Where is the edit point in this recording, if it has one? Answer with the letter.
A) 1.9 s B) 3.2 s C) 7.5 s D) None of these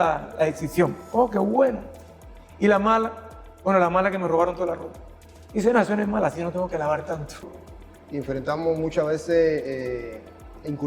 C